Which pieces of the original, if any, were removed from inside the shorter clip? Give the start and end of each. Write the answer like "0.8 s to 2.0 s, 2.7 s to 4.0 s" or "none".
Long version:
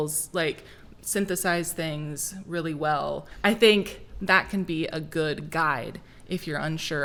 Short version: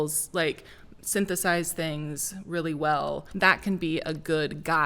3.2 s to 4.1 s

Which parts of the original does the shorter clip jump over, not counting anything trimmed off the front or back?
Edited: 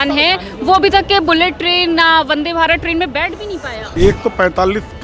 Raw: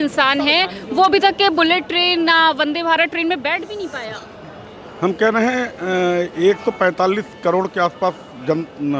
4.2 s to 6.3 s

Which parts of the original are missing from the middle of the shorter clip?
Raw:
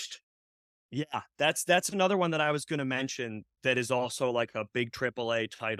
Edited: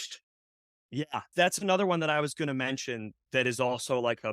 1.3 s to 1.6 s

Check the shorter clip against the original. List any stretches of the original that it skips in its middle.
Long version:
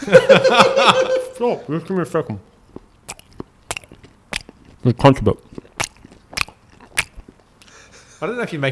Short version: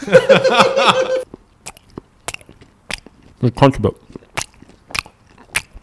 1.3 s to 2.7 s

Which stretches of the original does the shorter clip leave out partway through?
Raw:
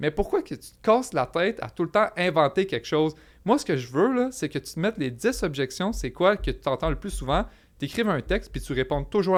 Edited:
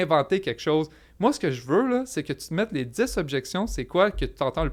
none

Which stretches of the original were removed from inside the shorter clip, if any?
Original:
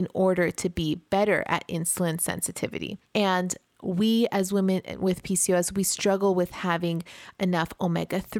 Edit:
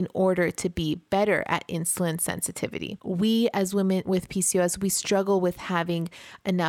2.9 s to 3.7 s, 4.8 s to 5.0 s

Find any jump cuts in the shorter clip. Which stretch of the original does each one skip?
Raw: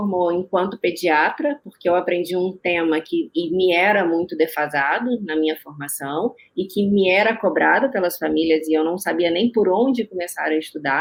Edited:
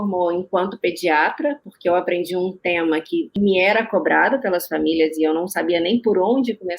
3.4 s to 6.9 s

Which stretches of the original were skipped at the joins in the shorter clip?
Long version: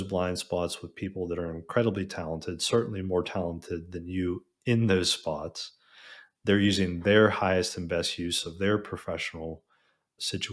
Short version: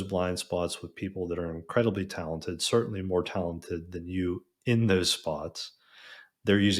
none

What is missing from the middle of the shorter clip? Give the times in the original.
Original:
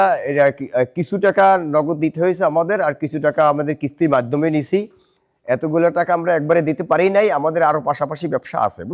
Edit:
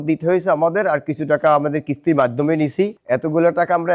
4.9 s to 5.4 s

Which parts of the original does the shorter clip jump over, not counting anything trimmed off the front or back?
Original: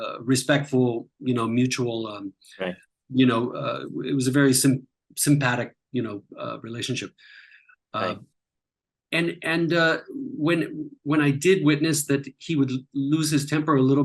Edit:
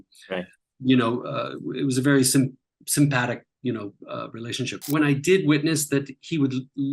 7.1 s to 11.0 s

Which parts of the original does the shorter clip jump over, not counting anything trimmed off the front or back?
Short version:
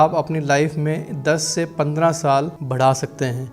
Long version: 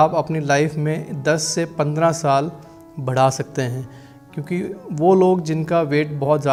2.6 s to 3.0 s

